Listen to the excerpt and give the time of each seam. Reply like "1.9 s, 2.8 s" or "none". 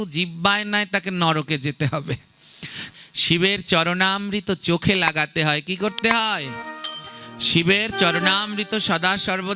2.8 s